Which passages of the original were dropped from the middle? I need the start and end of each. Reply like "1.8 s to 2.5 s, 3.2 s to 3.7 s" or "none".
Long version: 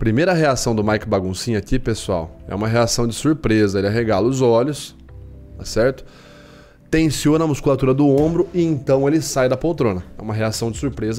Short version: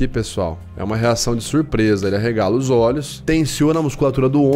4.8 s to 6.8 s